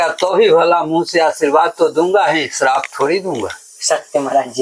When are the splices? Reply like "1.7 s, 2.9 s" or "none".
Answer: none